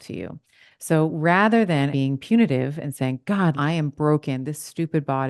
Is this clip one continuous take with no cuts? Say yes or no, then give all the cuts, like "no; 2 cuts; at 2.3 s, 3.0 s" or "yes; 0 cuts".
no; 2 cuts; at 1.9 s, 3.6 s